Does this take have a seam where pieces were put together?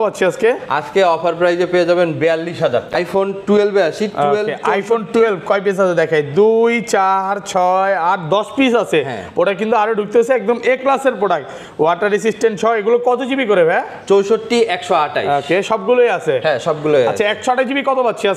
yes; 1 cut; at 2.9 s

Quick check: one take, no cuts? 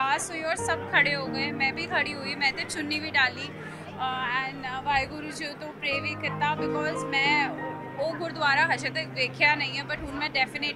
yes; 0 cuts

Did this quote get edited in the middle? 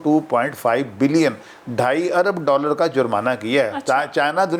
no; 0 cuts

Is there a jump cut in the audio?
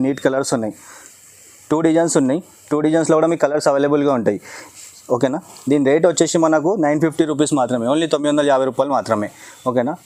no; 0 cuts

